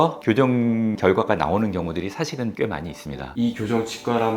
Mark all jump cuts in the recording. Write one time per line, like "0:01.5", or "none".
0:03.3